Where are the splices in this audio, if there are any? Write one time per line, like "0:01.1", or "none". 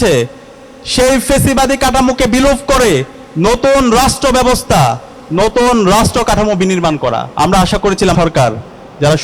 0:07.3
0:08.1